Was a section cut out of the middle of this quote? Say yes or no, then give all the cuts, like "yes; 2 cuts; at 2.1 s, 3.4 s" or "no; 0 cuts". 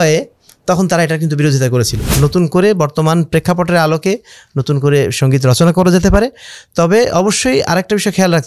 yes; 1 cut; at 2.0 s